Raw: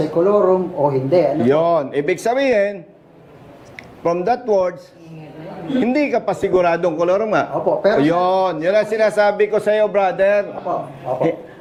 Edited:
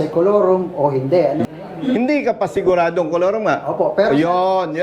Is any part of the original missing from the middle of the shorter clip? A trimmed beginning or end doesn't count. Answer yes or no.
yes